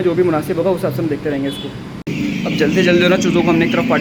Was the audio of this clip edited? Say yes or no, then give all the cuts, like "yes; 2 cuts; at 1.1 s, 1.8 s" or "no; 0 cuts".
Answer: no; 0 cuts